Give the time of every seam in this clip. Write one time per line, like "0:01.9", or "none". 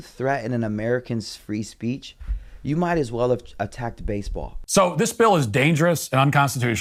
none